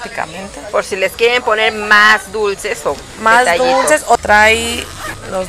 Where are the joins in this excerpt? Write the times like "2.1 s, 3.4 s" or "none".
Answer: 4.2 s